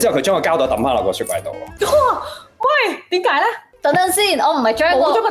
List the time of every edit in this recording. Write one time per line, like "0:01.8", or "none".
none